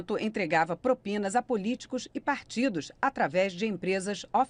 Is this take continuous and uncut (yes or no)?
yes